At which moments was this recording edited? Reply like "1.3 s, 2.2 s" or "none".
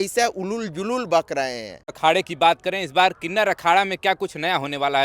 2.0 s